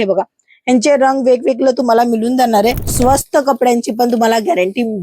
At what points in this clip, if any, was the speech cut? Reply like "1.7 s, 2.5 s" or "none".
2.9 s